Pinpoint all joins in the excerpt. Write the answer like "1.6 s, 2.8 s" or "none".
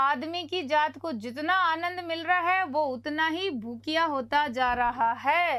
none